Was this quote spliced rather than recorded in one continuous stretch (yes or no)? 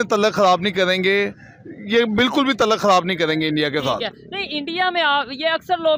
no